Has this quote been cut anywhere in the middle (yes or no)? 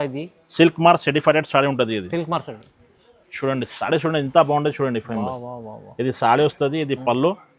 no